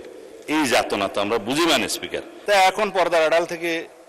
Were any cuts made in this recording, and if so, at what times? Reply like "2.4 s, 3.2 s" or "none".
2.3 s